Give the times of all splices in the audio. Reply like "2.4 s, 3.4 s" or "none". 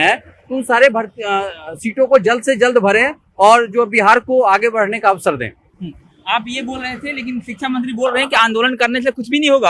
none